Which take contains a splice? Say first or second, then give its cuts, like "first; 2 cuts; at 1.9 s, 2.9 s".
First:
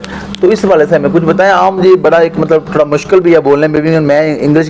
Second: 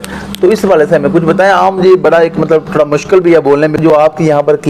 second; 1 cut; at 3.8 s